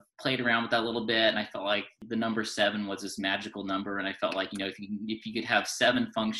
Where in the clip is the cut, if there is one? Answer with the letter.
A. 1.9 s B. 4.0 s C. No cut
A